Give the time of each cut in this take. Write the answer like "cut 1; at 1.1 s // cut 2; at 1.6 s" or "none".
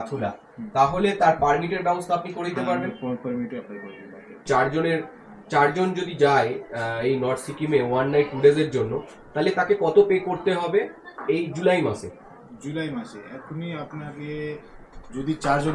cut 1; at 4.4 s

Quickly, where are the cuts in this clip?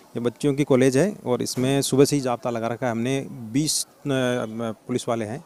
none

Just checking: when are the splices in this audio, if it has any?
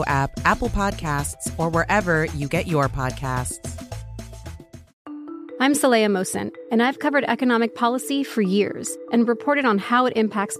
cut 1; at 4.8 s

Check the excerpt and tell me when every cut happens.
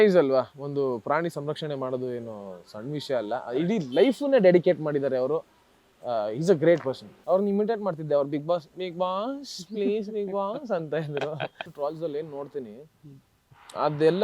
cut 1; at 7.1 s // cut 2; at 11.7 s

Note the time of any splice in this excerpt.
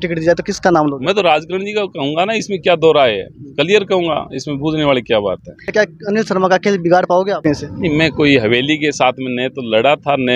cut 1; at 5.7 s // cut 2; at 7.4 s

